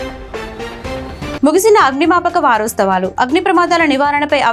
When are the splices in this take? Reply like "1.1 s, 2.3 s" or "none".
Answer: 1.4 s